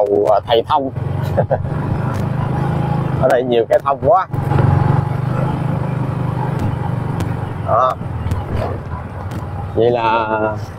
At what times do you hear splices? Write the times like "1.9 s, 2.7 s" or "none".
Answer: none